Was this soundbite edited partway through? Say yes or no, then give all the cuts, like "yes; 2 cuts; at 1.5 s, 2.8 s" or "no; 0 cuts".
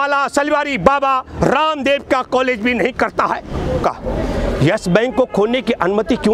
yes; 1 cut; at 3.8 s